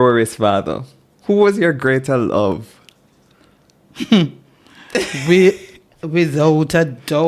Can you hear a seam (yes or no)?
no